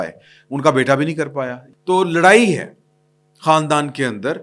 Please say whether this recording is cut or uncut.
cut